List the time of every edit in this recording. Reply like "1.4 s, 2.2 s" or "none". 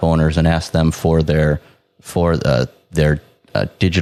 none